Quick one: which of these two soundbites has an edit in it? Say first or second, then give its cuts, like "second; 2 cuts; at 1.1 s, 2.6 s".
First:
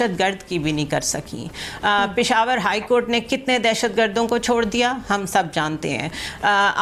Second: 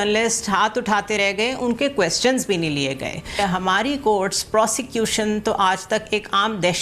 second; 1 cut; at 3.4 s